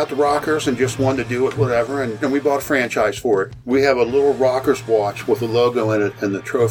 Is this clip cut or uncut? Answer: cut